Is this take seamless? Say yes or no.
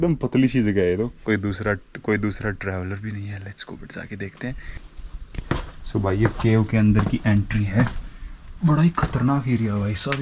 yes